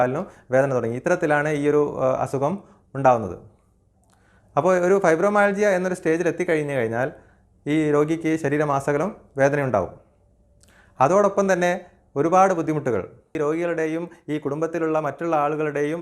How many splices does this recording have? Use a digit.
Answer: 1